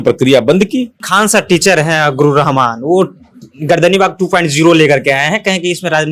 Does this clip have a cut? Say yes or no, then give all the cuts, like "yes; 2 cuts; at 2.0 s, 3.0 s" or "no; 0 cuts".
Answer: yes; 1 cut; at 1.0 s